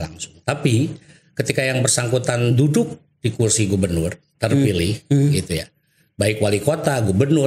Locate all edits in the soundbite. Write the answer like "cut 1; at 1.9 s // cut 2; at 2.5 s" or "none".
none

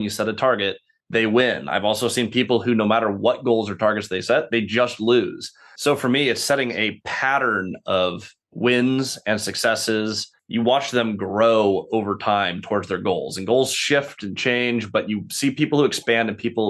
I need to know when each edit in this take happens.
cut 1; at 5.7 s

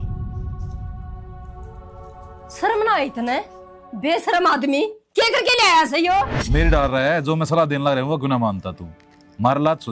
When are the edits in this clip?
cut 1; at 6.4 s

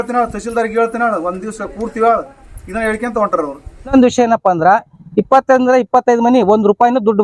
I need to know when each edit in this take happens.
cut 1; at 3.9 s

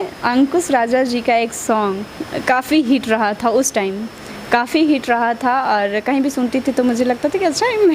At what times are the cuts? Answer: none

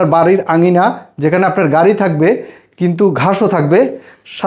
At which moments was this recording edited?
none

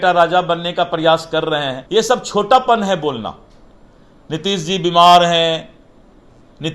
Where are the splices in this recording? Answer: cut 1; at 1.8 s

